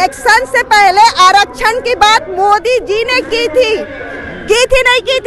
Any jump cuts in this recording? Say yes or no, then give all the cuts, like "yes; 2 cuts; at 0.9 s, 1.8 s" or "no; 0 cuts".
no; 0 cuts